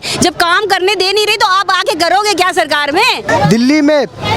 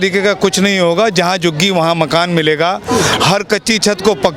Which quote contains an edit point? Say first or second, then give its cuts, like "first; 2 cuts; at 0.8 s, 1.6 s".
first; 1 cut; at 3.3 s